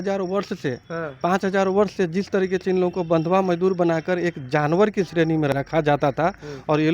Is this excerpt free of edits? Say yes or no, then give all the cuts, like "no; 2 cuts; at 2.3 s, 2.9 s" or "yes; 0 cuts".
no; 1 cut; at 5.5 s